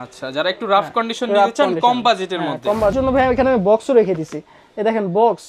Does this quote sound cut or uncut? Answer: cut